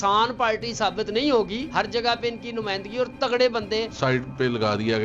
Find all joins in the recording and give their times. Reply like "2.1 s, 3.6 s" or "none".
1.7 s, 3.9 s